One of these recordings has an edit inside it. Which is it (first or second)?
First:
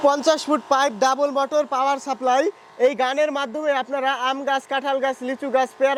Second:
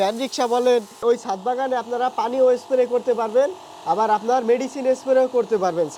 second